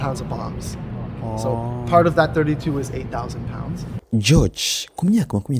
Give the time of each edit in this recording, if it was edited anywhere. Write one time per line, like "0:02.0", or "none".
0:03.9